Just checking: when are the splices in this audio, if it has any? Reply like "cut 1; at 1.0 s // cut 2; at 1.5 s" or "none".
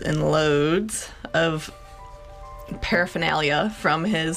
none